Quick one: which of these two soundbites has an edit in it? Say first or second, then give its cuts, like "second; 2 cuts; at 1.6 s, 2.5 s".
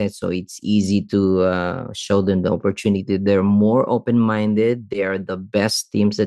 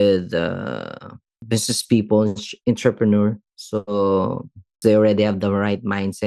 second; 2 cuts; at 1.4 s, 4.8 s